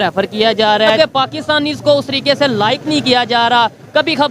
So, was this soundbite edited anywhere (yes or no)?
yes